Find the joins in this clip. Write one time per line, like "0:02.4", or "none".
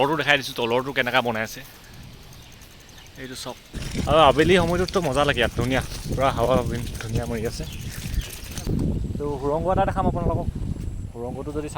0:03.8
0:08.6